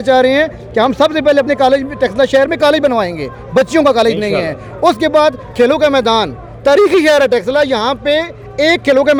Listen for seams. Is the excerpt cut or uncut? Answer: uncut